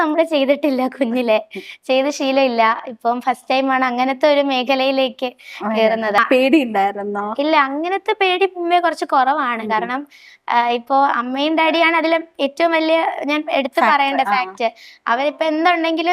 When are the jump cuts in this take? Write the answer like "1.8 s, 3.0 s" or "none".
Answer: 6.2 s